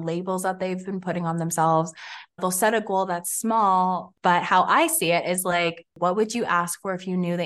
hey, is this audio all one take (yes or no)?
no